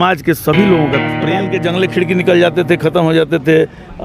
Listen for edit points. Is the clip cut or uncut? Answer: cut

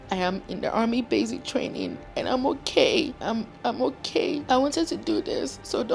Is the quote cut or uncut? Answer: uncut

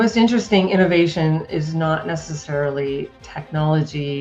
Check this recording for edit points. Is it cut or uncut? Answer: uncut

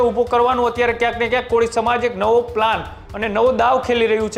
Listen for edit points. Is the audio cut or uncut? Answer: uncut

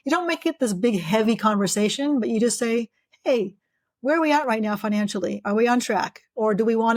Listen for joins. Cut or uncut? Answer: uncut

